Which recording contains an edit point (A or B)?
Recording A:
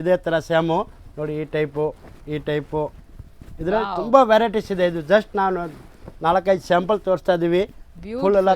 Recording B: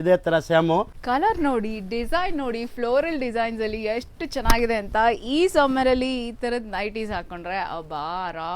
B